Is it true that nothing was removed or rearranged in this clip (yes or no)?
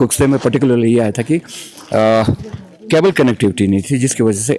yes